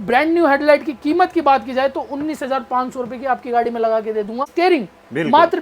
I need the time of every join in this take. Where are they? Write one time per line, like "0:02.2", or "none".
0:04.5